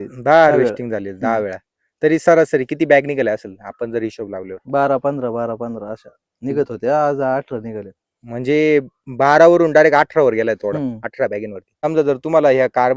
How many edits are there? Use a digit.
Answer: 1